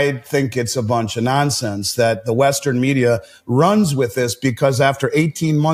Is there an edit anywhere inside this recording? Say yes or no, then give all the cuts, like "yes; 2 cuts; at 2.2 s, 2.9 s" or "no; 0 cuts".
no; 0 cuts